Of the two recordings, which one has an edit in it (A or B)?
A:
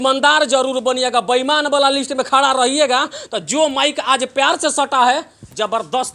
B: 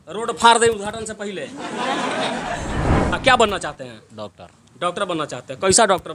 B